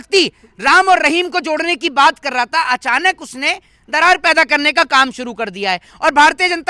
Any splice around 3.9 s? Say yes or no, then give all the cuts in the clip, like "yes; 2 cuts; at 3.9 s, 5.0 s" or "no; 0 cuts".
no; 0 cuts